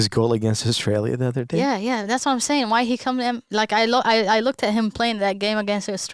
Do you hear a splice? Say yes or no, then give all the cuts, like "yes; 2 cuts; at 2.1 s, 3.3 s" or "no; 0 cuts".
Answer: no; 0 cuts